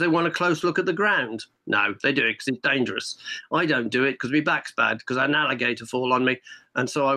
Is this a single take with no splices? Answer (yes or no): yes